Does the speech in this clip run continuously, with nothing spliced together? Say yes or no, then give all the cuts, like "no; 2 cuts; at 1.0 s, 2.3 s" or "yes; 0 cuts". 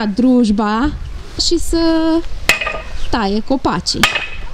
no; 1 cut; at 1.4 s